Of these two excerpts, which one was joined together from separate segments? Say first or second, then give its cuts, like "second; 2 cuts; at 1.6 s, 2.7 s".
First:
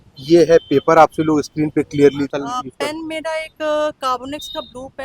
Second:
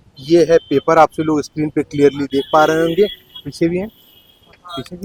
first; 1 cut; at 2.3 s